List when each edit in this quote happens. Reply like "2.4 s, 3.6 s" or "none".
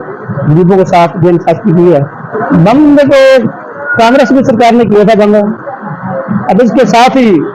2.4 s